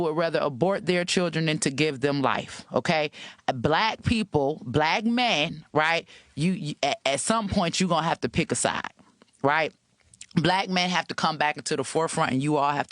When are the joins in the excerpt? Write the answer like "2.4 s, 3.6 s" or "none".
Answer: 2.5 s